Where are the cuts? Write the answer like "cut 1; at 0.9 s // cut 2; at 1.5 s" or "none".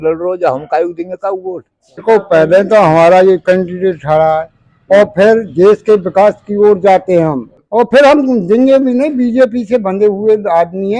cut 1; at 2.0 s // cut 2; at 7.5 s